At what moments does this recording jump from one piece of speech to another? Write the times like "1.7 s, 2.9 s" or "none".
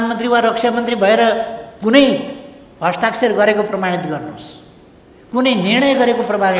none